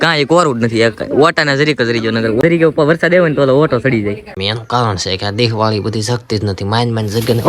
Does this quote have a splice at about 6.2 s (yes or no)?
no